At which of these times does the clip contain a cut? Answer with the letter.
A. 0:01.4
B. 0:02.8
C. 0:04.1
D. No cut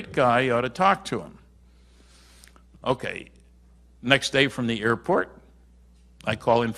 B